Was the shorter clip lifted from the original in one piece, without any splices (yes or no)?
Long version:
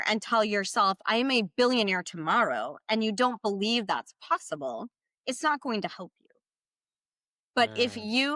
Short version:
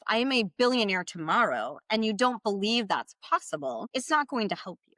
no